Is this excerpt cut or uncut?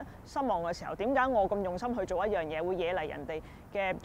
uncut